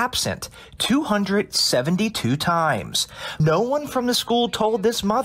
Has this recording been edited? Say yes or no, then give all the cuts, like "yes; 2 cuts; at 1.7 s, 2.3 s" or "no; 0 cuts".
yes; 1 cut; at 3.4 s